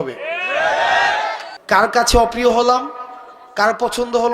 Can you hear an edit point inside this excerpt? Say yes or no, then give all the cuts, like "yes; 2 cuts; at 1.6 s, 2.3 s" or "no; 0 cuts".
yes; 1 cut; at 1.5 s